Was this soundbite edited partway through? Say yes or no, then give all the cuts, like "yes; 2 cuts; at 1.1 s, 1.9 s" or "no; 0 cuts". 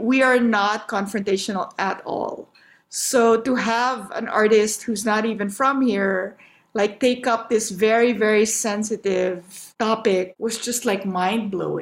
yes; 1 cut; at 10.3 s